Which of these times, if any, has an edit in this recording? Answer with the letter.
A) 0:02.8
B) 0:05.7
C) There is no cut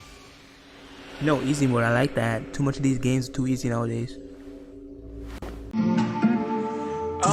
B